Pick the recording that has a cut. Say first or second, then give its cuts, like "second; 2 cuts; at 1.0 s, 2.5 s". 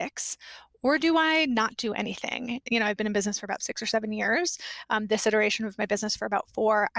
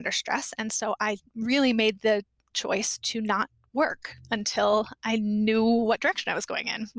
first; 2 cuts; at 2.6 s, 3.7 s